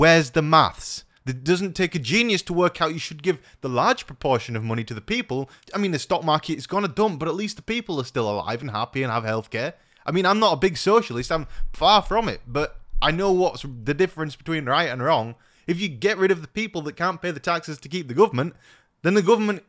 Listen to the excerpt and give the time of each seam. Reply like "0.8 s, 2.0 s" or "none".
1.2 s, 5.6 s, 15.5 s